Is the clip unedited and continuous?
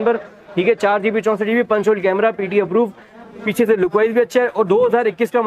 yes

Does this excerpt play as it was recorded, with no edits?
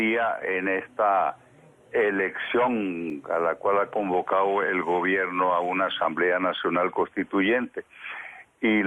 no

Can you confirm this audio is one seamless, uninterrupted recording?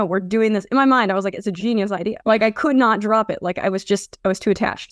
yes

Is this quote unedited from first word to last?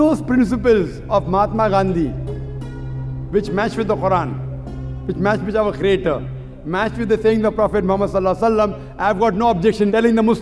yes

